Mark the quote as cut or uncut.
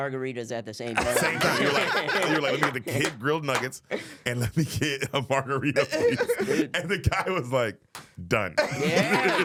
uncut